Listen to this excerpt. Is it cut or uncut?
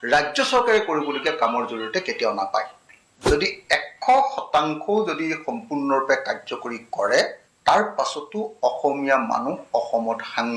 cut